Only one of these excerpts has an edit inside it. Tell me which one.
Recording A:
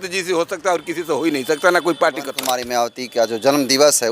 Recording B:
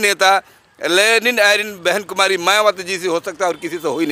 A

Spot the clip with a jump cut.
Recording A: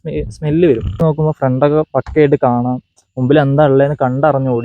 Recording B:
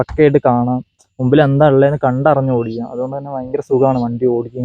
A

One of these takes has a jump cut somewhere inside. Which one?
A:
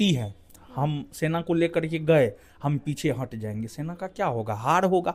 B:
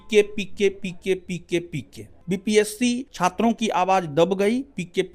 B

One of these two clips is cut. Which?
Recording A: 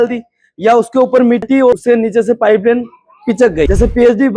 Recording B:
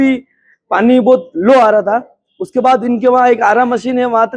A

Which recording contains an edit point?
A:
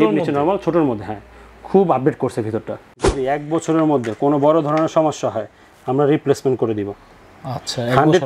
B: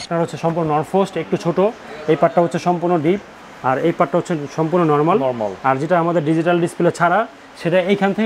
A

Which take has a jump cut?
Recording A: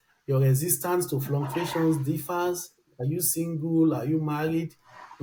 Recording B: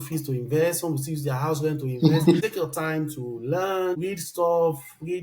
B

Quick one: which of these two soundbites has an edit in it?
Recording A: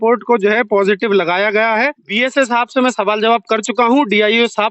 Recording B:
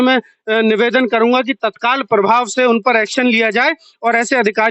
A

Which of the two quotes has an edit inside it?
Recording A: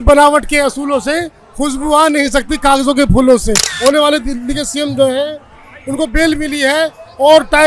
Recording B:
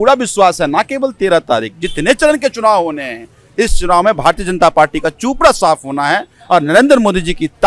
A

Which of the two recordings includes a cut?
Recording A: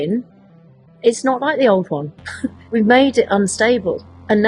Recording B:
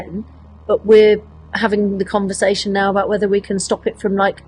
A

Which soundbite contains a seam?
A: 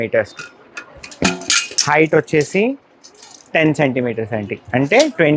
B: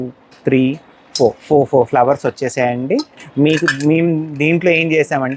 B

